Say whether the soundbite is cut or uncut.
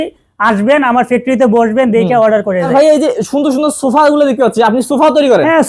cut